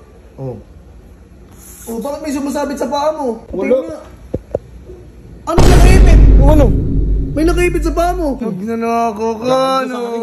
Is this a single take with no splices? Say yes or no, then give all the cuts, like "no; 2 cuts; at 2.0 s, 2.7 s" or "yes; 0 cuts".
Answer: no; 2 cuts; at 3.4 s, 8.4 s